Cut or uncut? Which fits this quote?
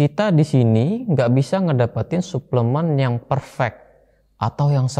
uncut